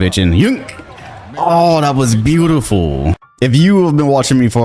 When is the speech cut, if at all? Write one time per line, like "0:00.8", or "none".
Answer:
0:03.2